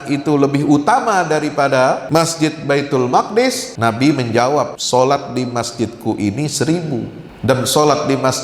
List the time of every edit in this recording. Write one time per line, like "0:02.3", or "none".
0:02.0
0:03.7
0:04.8
0:07.2